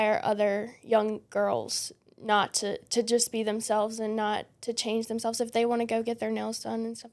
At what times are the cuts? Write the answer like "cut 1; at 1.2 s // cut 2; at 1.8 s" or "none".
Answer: none